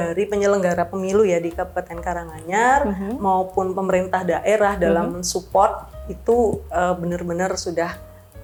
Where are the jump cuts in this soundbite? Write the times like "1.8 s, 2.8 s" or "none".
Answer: none